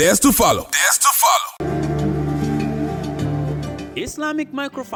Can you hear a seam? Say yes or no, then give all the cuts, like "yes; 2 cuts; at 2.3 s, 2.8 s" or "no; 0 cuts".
no; 0 cuts